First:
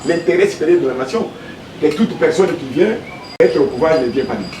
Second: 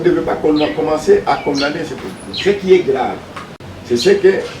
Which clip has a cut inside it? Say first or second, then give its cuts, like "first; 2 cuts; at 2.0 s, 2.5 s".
first; 1 cut; at 1.5 s